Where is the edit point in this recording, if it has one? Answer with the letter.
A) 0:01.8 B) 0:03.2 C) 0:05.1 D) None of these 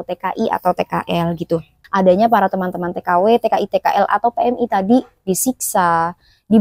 A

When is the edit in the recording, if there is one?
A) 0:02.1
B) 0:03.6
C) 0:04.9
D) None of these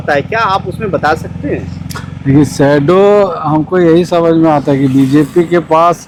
D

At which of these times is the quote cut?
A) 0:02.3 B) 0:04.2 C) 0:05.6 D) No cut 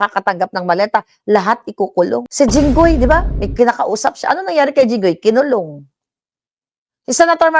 A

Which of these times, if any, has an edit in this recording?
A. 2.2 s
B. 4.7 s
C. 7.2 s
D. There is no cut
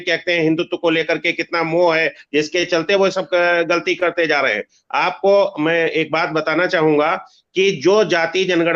D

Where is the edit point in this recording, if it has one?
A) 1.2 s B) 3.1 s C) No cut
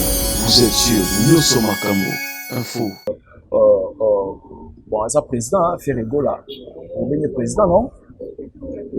B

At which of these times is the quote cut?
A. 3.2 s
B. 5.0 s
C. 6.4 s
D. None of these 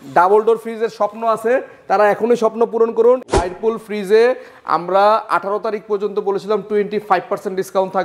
A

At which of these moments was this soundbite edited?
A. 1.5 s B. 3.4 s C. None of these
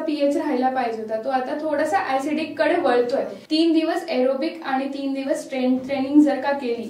B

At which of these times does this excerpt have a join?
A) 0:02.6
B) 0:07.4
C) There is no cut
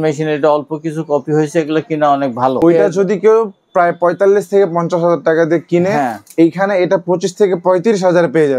A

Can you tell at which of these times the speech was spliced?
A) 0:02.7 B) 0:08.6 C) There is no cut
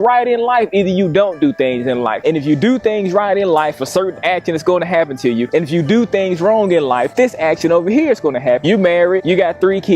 B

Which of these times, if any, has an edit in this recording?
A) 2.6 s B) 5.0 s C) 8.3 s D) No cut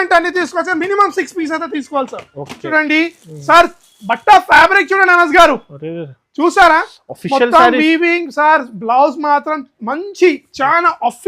A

